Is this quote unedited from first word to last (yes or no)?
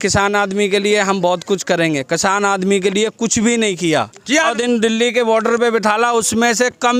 yes